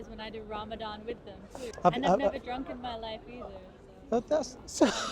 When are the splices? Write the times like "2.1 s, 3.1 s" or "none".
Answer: 1.7 s

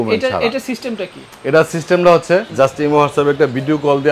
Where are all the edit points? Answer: 2.5 s

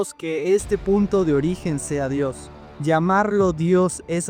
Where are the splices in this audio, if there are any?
none

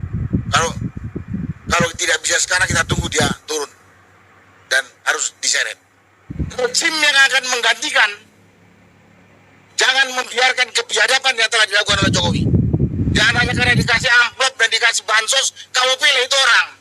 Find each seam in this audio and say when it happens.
6.3 s, 13.0 s

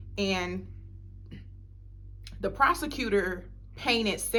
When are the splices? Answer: none

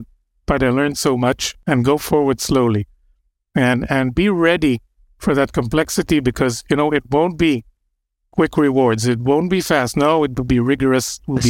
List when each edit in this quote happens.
1.5 s

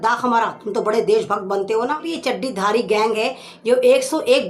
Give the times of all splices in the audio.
2.1 s

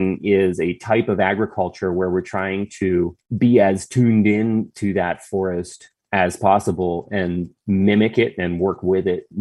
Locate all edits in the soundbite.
none

